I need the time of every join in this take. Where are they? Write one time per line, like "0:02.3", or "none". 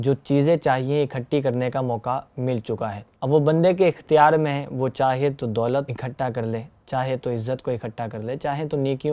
0:03.1
0:05.9